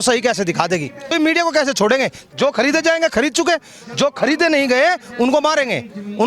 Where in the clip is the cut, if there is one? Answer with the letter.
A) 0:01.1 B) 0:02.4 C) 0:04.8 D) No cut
A